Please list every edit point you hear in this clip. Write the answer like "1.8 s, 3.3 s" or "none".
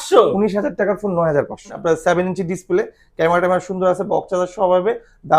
1.8 s